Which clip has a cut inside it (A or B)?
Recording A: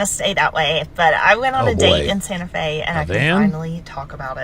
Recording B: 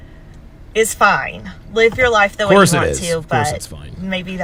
A